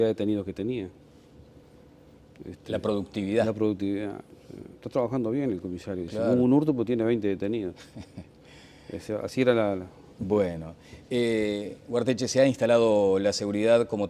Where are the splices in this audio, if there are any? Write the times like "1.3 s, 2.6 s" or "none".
6.0 s